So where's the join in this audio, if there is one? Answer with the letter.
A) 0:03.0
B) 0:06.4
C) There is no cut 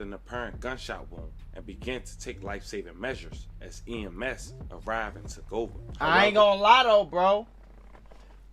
C